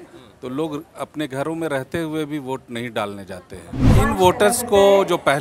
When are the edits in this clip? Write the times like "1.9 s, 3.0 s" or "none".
3.9 s